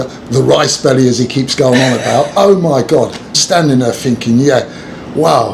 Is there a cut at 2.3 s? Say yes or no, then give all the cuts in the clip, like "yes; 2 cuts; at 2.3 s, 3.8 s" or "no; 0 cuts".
yes; 2 cuts; at 2.3 s, 3.4 s